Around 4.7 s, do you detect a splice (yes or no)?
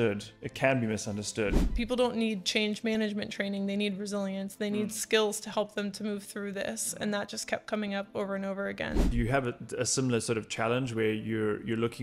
no